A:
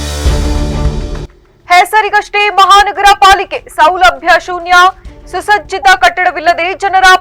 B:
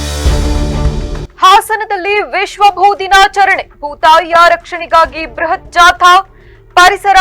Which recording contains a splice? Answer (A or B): B